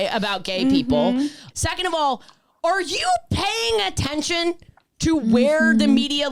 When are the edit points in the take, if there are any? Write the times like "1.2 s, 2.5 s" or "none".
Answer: 1.4 s